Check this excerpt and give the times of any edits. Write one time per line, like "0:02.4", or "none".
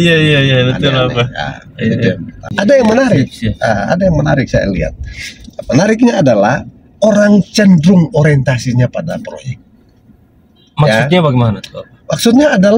0:02.4